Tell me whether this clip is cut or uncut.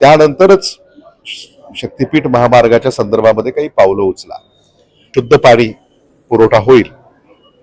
cut